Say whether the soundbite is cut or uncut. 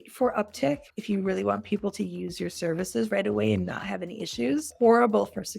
cut